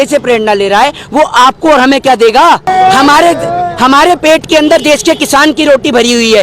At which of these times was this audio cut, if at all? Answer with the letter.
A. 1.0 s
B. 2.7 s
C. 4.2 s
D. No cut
B